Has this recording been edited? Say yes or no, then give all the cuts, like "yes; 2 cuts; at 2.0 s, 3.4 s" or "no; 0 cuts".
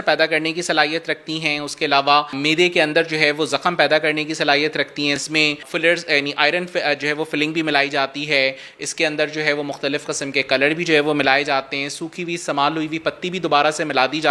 yes; 2 cuts; at 2.4 s, 5.2 s